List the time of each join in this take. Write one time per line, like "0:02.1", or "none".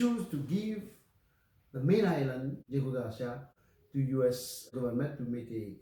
none